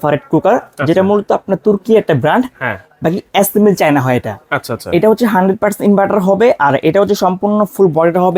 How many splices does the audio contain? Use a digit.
0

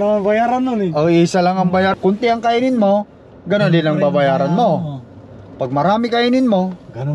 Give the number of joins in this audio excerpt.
1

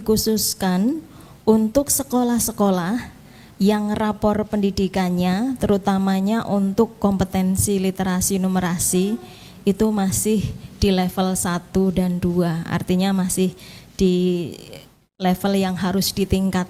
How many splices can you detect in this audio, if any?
0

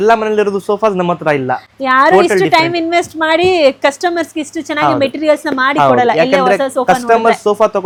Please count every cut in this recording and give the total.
0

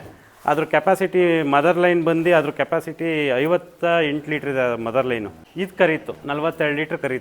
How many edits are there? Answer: 1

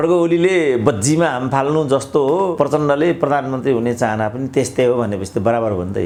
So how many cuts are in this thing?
0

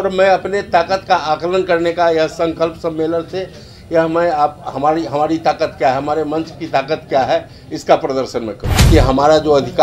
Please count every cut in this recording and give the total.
1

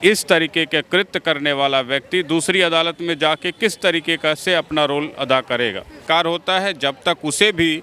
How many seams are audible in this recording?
1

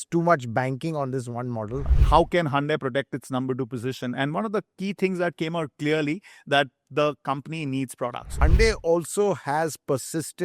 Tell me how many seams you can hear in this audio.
2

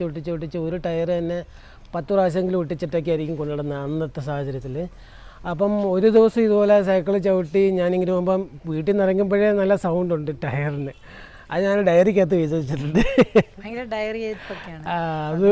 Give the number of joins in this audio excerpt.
0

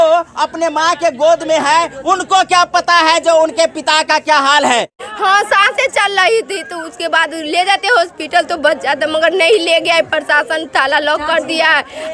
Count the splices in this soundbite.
1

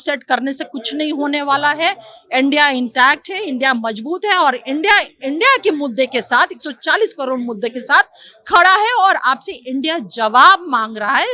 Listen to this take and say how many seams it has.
0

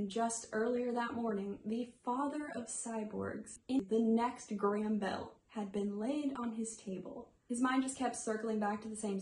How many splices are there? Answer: 1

